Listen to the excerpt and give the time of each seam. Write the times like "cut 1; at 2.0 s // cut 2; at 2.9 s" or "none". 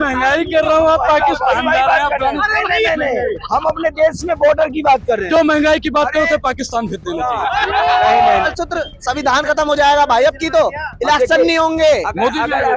cut 1; at 8.5 s